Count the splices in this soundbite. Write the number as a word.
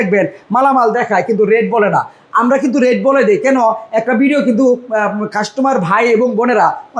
zero